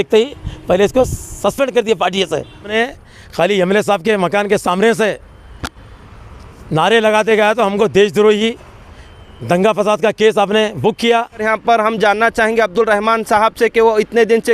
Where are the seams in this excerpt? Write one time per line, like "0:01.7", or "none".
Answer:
0:02.7
0:11.5